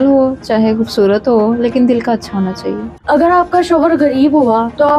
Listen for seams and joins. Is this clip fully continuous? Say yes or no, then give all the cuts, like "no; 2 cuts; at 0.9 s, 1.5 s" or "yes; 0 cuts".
no; 1 cut; at 2.9 s